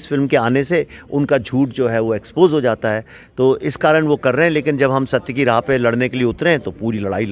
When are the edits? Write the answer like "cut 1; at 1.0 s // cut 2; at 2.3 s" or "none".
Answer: none